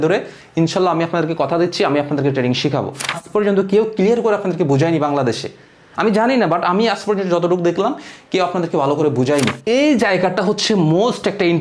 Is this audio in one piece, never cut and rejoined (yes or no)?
no